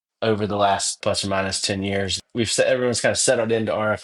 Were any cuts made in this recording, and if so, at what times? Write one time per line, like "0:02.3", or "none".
0:01.0
0:02.2